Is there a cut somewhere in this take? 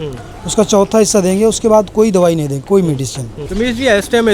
yes; 1 cut; at 3.4 s

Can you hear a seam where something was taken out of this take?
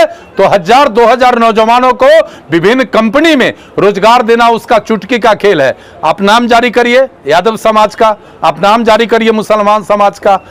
no; 0 cuts

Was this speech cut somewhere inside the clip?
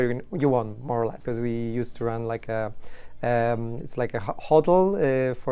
yes; 1 cut; at 1.2 s

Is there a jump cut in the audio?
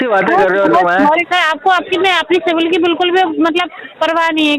yes; 1 cut; at 1.3 s

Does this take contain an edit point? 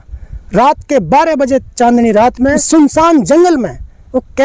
yes; 1 cut; at 2.6 s

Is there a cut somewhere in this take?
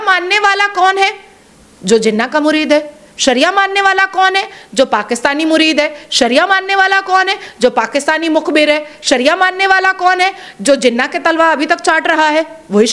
no; 0 cuts

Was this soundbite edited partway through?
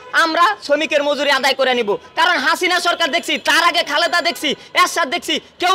no; 0 cuts

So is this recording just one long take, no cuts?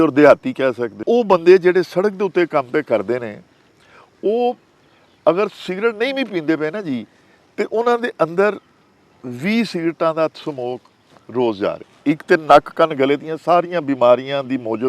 no; 2 cuts; at 1.0 s, 11.9 s

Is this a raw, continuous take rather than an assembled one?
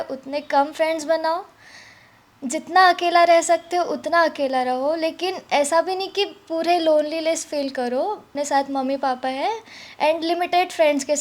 no; 1 cut; at 8.3 s

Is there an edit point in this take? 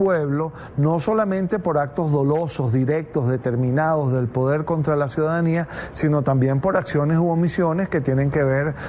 yes; 1 cut; at 6.1 s

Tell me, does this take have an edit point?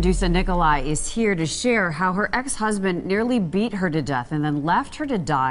no; 0 cuts

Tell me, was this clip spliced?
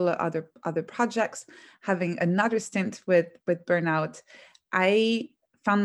yes; 1 cut; at 3.3 s

